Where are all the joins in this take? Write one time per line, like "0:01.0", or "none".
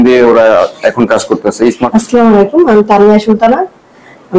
0:01.8